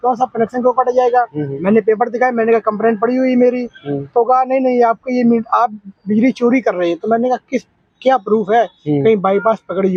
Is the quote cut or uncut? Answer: uncut